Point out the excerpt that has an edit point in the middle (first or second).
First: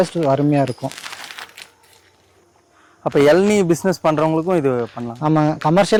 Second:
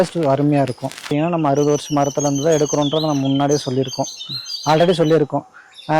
second